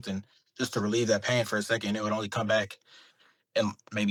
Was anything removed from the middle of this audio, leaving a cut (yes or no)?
no